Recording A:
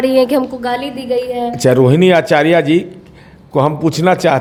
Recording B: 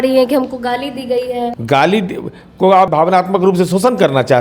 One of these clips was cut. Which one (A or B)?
B